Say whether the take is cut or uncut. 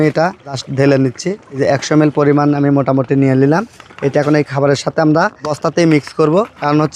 uncut